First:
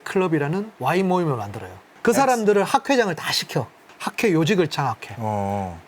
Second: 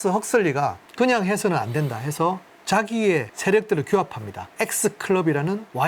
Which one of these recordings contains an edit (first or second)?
first